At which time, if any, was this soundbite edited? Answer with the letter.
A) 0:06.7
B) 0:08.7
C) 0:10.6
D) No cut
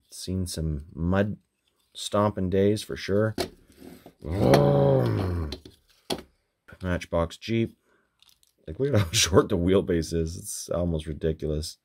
A